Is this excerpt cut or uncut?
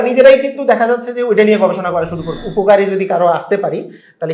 cut